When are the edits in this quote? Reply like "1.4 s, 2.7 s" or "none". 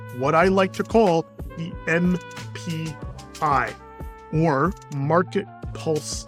none